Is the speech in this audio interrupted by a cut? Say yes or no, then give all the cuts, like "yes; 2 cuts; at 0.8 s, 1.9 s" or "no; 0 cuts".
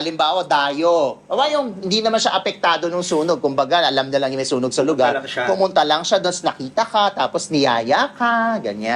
no; 0 cuts